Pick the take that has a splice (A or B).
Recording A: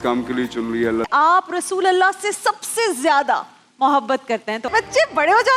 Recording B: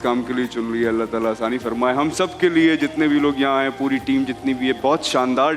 A